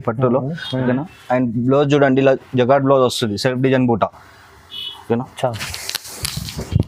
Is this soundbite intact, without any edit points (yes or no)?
yes